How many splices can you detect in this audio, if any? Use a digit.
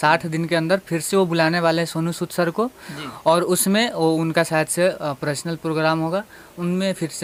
0